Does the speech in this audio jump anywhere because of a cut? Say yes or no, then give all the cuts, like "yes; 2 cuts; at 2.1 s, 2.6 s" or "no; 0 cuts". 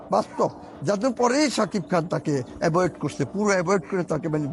no; 0 cuts